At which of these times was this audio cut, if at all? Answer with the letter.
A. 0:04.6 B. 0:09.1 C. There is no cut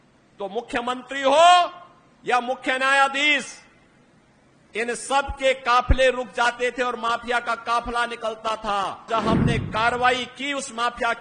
B